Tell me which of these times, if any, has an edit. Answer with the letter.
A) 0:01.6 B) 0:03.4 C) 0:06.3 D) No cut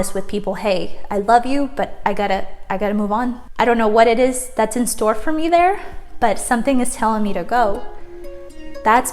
B